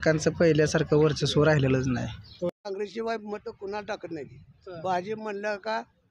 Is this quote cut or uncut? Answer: cut